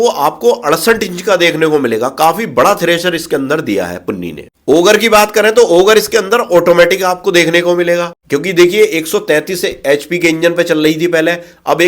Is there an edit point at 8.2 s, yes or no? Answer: yes